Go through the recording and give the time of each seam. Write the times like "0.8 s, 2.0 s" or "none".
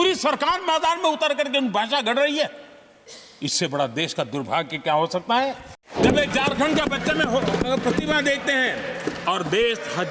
6.0 s